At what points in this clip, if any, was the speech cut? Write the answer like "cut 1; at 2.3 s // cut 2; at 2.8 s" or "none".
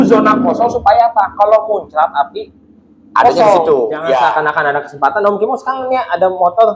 cut 1; at 4.2 s